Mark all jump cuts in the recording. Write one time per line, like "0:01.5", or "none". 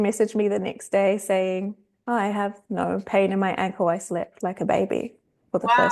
none